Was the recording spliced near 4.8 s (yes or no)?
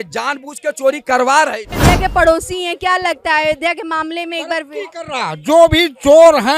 no